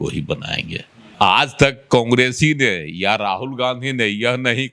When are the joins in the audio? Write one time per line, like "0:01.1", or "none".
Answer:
0:01.1

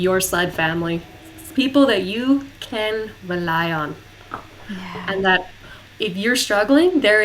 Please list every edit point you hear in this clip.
none

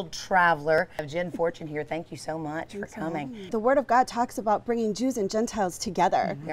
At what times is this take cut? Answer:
0:01.0
0:03.5

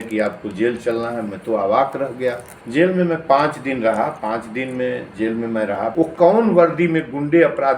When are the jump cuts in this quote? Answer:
0:02.5
0:05.9

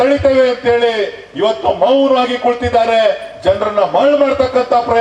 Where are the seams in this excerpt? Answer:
none

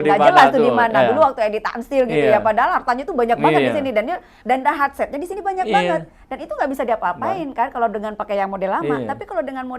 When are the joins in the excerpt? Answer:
0:04.4

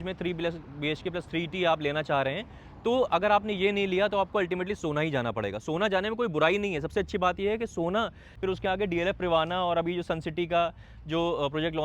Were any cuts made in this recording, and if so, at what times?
0:08.2

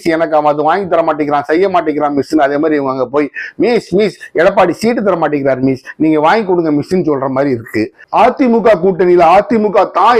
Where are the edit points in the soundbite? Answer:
0:08.0

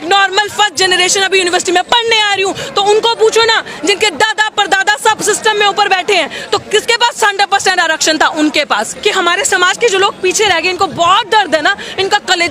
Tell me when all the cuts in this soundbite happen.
0:08.9

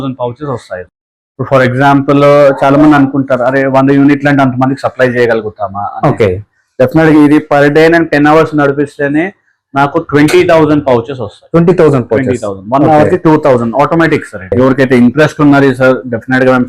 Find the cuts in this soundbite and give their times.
0:14.5

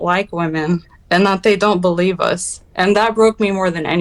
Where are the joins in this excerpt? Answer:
none

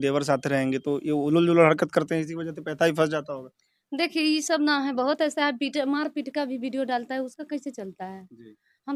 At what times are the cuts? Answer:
none

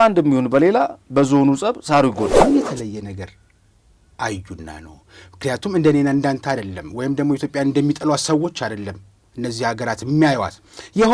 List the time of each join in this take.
0:02.4

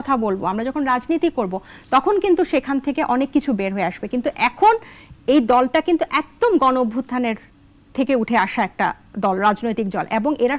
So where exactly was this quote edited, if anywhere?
none

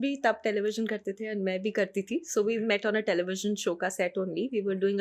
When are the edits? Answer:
none

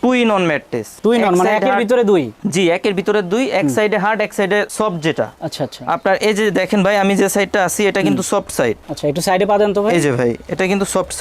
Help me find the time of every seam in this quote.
none

